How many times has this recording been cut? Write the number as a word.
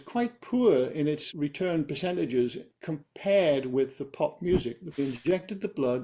one